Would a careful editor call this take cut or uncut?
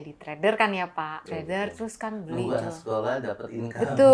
cut